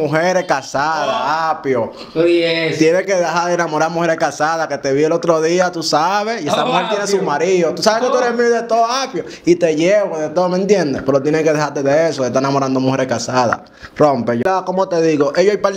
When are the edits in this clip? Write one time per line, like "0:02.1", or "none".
0:14.4